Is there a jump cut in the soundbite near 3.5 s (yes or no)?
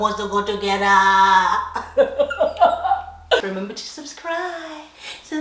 yes